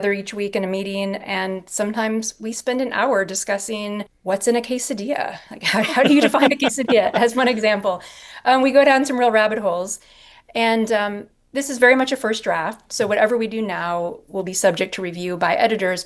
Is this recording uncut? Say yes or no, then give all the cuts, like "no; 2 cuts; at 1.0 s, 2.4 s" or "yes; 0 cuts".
no; 1 cut; at 4.1 s